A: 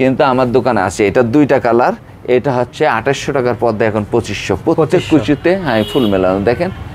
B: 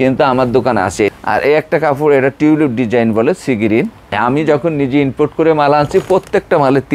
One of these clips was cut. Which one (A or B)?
B